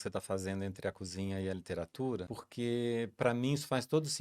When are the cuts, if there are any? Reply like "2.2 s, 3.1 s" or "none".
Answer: 2.3 s